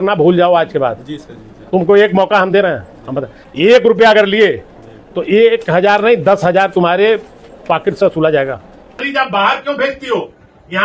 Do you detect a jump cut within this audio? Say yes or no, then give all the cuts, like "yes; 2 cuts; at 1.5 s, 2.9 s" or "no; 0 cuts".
no; 0 cuts